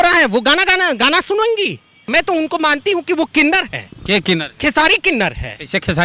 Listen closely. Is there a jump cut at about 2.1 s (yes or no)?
yes